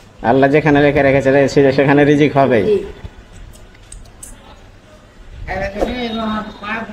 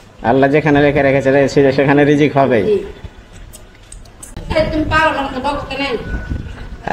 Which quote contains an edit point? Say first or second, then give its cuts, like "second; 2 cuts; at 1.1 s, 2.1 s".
second; 1 cut; at 4.3 s